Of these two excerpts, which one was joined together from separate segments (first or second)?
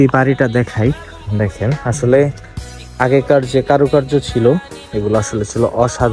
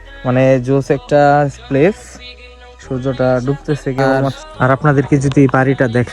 second